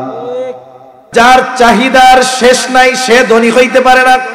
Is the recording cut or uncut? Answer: cut